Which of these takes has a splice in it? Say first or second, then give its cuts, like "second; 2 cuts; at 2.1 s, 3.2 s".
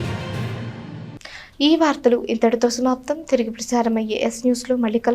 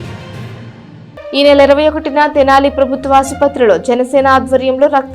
second; 1 cut; at 0.9 s